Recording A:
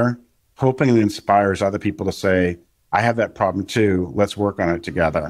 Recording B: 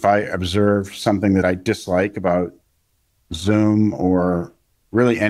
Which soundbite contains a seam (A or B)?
B